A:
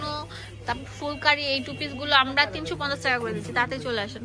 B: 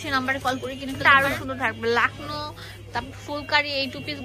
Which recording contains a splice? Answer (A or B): B